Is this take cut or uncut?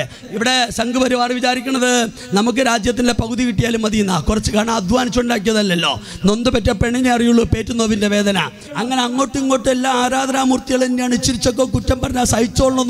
cut